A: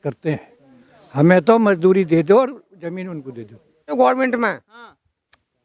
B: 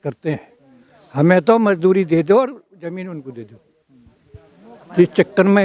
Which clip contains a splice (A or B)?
A